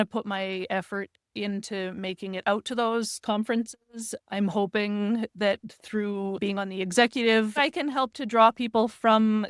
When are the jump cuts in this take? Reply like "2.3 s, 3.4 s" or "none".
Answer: 6.4 s, 7.6 s